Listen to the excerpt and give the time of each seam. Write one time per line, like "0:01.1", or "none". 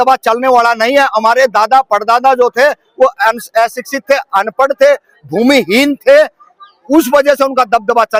none